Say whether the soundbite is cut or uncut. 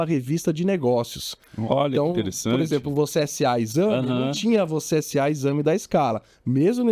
uncut